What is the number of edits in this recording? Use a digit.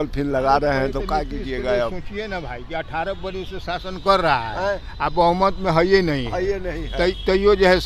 0